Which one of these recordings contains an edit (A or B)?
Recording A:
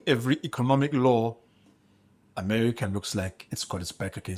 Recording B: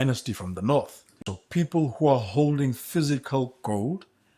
B